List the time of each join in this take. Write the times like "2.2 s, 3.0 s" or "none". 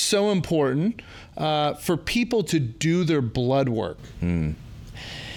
none